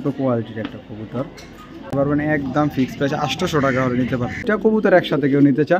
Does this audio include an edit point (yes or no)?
yes